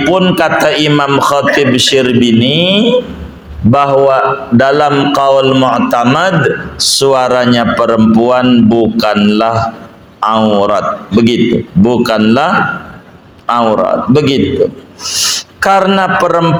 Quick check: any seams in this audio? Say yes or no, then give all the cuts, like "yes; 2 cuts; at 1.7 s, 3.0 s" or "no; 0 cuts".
no; 0 cuts